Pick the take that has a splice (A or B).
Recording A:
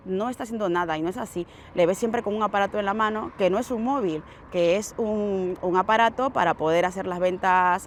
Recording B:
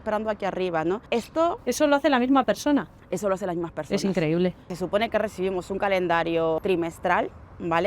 B